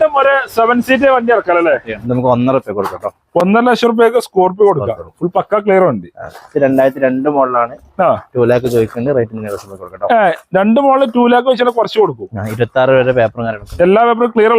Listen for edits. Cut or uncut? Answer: cut